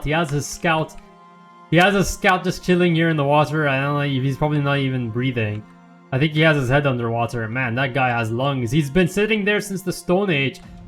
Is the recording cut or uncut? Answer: uncut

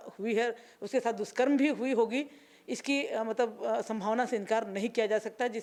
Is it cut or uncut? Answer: uncut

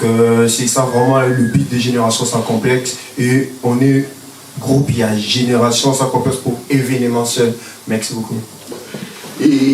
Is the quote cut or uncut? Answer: cut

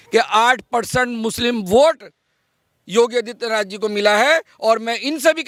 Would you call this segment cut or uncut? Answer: uncut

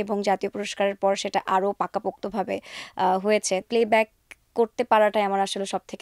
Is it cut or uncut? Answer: cut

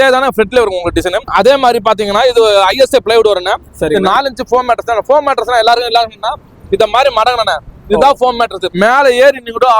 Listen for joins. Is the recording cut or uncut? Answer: cut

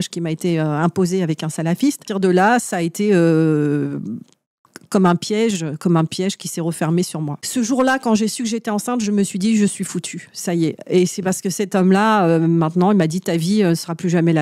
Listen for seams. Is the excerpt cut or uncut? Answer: cut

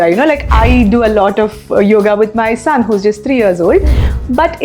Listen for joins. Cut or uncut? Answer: uncut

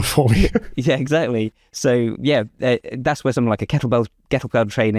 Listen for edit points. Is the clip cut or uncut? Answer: uncut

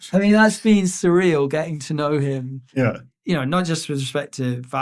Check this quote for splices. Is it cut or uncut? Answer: cut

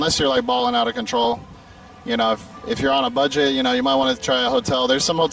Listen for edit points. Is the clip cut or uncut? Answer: uncut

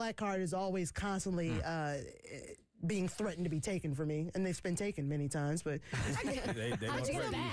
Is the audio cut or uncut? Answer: uncut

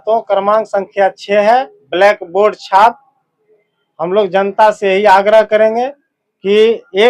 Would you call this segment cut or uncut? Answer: uncut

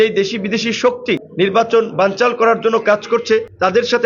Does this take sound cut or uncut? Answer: uncut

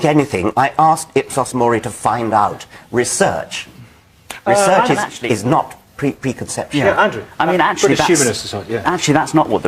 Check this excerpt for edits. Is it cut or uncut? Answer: cut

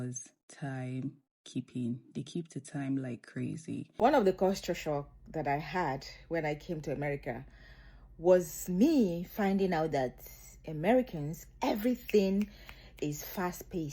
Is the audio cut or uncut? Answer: cut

